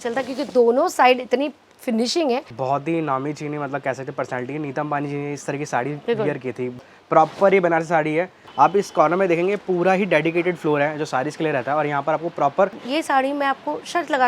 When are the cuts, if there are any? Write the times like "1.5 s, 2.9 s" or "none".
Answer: 2.5 s, 6.7 s, 8.4 s, 12.8 s